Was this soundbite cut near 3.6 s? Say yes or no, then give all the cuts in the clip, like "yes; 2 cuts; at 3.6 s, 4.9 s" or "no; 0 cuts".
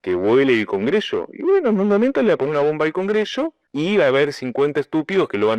yes; 1 cut; at 3.6 s